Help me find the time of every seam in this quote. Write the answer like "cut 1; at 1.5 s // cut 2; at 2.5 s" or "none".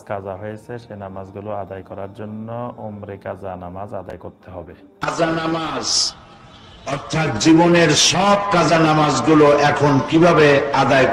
cut 1; at 4.8 s